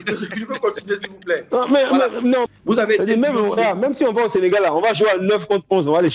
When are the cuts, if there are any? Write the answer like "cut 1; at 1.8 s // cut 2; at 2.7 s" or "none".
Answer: cut 1; at 2.5 s